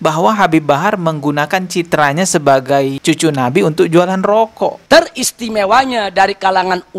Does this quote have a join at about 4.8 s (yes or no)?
yes